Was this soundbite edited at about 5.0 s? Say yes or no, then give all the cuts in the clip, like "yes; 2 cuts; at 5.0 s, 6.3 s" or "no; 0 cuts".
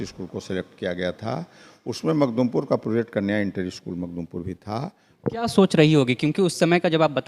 yes; 1 cut; at 5.0 s